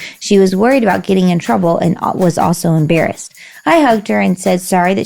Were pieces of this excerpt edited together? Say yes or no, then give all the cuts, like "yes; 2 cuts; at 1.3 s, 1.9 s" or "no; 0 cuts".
no; 0 cuts